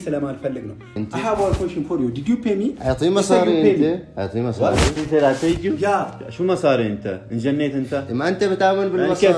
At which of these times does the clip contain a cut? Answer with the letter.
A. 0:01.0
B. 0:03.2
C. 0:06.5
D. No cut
A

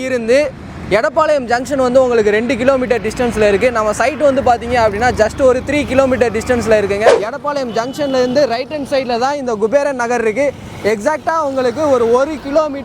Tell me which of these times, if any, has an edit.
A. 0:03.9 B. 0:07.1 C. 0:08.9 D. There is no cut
B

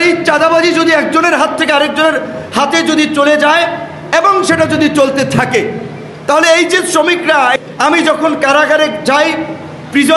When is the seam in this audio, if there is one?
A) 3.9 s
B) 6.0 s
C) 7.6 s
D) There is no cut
C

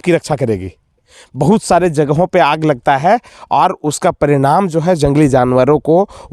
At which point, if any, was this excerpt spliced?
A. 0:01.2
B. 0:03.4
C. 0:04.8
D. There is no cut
A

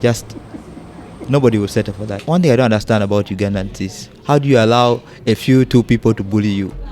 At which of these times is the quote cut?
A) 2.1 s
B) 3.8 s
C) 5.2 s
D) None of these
A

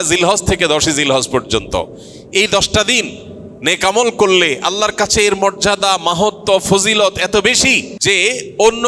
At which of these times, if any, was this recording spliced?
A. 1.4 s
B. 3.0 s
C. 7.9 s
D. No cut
C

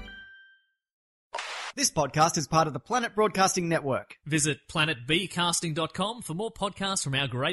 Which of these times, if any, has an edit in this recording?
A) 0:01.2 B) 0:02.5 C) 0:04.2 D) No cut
A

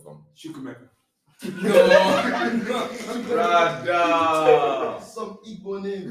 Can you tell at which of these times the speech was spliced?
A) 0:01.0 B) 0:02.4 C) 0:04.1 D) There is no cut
D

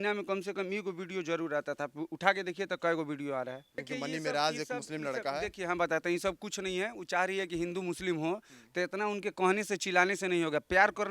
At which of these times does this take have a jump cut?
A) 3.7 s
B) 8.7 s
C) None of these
A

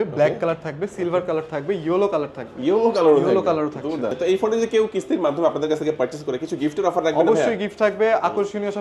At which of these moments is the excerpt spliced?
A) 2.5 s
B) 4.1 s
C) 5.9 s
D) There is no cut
B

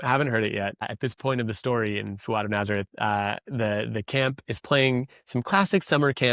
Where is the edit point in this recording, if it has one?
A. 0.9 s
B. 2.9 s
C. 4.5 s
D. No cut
A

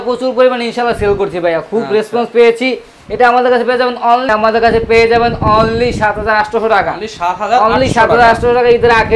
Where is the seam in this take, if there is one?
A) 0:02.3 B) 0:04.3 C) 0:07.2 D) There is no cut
B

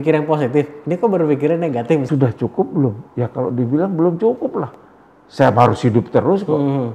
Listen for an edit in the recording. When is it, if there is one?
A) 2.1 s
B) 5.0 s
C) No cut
A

